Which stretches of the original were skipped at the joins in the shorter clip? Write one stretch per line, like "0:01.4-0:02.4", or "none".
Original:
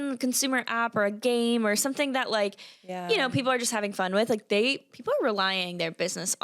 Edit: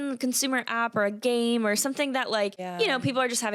0:02.6-0:02.9